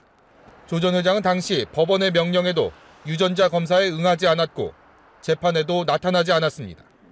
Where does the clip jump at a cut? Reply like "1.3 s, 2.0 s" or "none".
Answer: none